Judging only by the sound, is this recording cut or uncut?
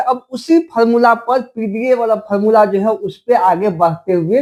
uncut